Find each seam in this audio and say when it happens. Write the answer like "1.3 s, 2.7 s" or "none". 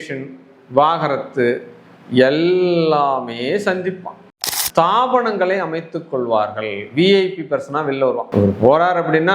4.2 s